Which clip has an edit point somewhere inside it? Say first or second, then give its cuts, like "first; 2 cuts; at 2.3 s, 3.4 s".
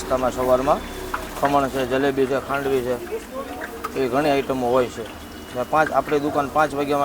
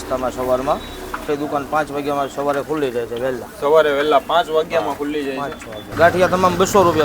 second; 2 cuts; at 1.2 s, 5.9 s